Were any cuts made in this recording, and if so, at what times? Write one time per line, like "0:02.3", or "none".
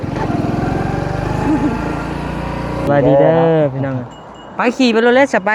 0:02.9